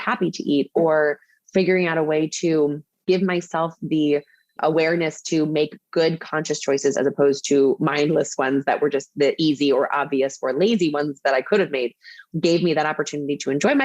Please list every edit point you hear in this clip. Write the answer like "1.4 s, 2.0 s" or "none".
3.0 s, 12.2 s